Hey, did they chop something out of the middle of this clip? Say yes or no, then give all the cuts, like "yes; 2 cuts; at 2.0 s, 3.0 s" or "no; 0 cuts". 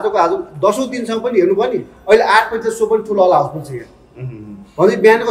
no; 0 cuts